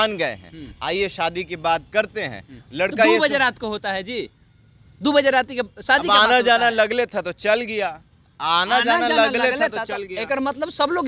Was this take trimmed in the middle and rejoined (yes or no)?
no